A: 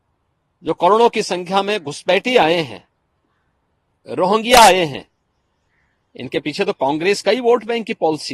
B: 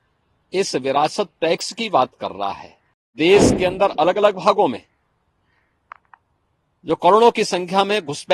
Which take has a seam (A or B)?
B